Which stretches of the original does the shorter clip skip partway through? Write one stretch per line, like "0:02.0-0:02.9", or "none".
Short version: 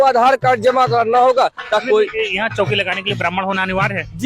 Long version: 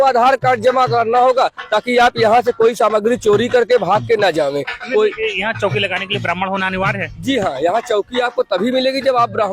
0:01.8-0:04.9